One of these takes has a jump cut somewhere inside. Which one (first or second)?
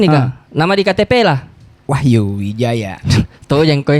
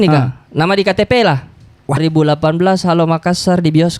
second